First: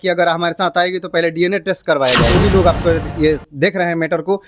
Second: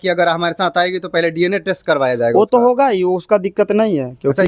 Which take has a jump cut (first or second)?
first